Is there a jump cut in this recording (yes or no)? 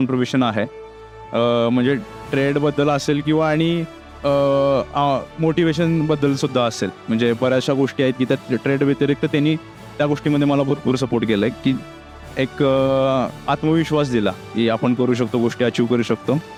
no